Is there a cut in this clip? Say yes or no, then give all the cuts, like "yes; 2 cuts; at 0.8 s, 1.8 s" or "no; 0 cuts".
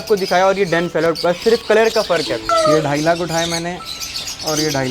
yes; 1 cut; at 2.5 s